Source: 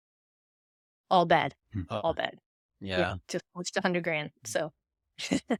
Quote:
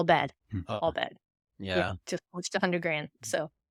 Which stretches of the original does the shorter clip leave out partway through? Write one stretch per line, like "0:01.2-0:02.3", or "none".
none